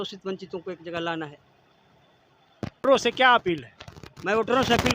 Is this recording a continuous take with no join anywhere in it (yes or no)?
no